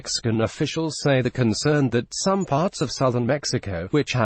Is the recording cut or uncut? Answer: cut